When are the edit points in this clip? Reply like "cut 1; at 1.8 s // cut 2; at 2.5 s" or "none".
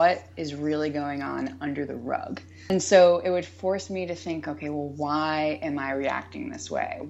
cut 1; at 2.7 s